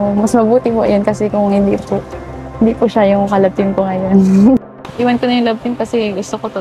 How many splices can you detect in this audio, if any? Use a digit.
1